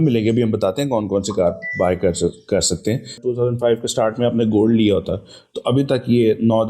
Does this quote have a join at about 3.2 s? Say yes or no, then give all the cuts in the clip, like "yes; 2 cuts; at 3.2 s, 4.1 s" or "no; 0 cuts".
yes; 1 cut; at 3.2 s